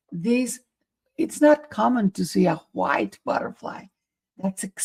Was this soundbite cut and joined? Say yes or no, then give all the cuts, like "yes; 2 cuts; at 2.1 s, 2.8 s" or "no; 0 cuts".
no; 0 cuts